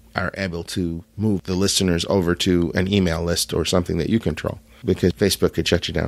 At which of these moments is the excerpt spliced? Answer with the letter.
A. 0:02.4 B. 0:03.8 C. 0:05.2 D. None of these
C